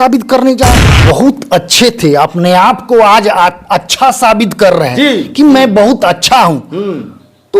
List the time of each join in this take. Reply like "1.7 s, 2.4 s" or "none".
0.9 s